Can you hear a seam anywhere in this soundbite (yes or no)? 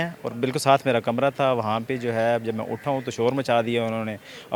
no